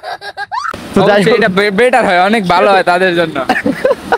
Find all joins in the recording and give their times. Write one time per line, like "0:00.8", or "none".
none